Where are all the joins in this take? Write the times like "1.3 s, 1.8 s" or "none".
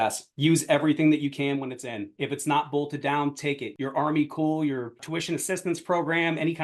3.7 s, 5.0 s